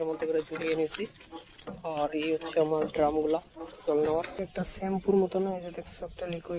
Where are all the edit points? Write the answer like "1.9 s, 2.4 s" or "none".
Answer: 4.4 s

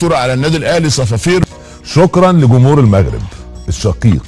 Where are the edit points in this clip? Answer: 1.5 s

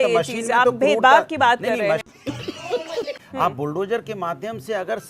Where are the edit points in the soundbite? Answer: 3.2 s

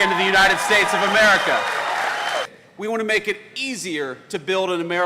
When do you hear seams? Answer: 2.5 s

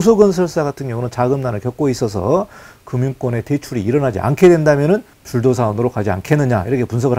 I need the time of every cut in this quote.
5.2 s

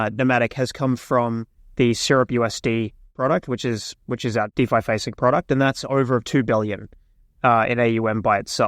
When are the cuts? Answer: 3.1 s, 4.5 s

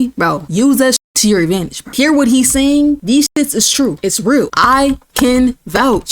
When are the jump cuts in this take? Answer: 0.8 s, 3.0 s, 4.4 s

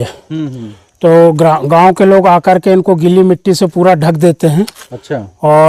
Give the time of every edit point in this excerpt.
none

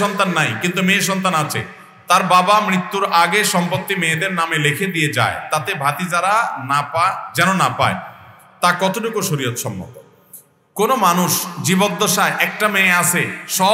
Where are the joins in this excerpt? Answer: none

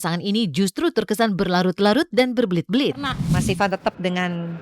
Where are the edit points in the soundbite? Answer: 3.1 s

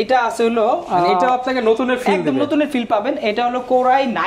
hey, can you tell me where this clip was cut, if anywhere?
none

